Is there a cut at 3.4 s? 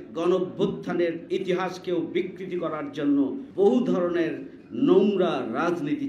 yes; 1 cut; at 3.4 s

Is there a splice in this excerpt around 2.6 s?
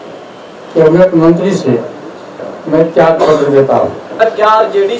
no; 1 cut; at 4.1 s

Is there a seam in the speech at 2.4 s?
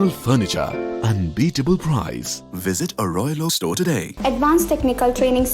no; 1 cut; at 4.1 s

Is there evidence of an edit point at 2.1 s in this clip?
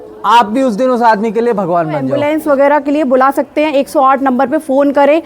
yes; 1 cut; at 2.1 s

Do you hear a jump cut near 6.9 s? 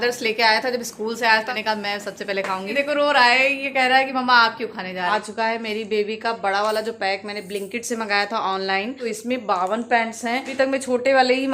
no; 5 cuts; at 1.5 s, 2.7 s, 5.1 s, 9.0 s, 10.5 s

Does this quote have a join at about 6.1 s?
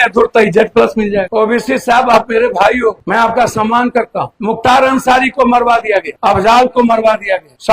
no; 1 cut; at 1.2 s

